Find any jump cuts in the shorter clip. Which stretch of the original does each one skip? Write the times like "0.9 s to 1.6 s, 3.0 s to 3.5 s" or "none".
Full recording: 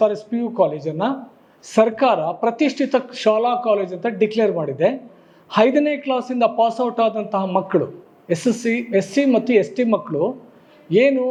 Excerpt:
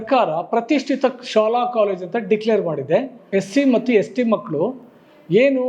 5.1 s to 8.8 s